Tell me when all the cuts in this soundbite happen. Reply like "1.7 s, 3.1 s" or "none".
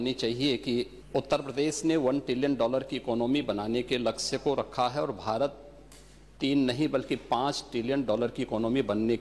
1.0 s